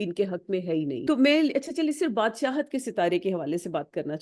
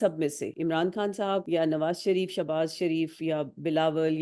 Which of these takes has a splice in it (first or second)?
first